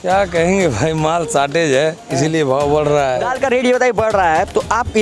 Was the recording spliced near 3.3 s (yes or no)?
yes